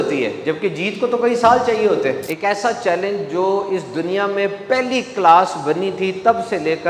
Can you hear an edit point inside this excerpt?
yes; 1 cut; at 2.3 s

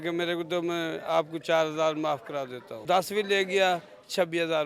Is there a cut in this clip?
yes; 1 cut; at 2.8 s

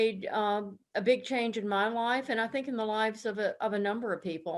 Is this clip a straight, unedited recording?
yes; 0 cuts

